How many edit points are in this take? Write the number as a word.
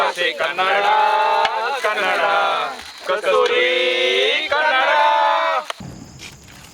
one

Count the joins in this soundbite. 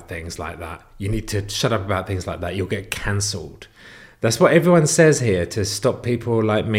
zero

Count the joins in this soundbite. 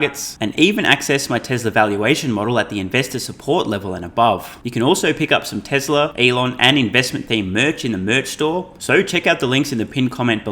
three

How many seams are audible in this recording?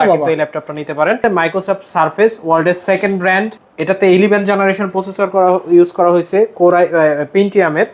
one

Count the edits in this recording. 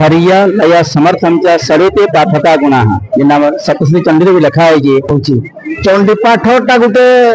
one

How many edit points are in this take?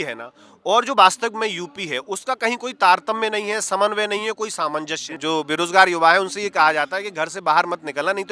one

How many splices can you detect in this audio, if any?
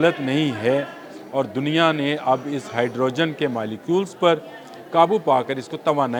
zero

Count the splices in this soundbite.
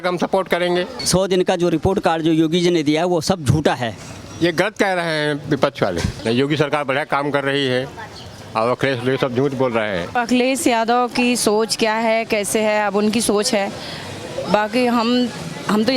three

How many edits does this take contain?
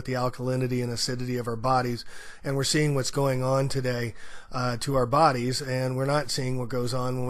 one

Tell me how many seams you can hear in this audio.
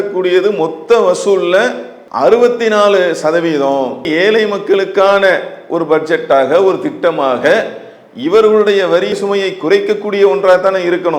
one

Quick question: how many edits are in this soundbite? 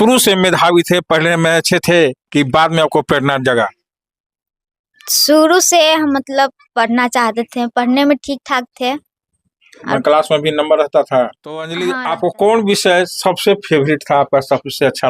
one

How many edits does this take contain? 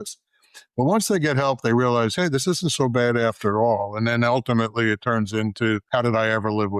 one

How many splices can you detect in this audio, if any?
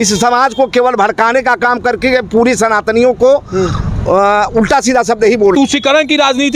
one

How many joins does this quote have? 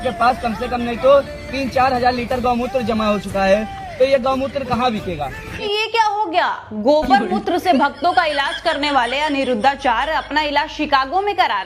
one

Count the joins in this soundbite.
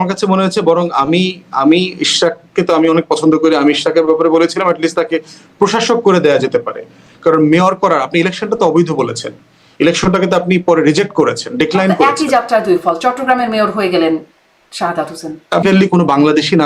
one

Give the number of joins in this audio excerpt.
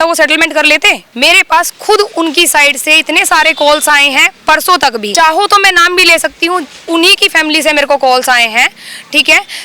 two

